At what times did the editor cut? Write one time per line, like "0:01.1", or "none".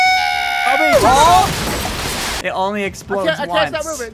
0:02.3